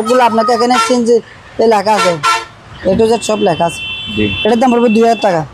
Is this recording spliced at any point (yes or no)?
no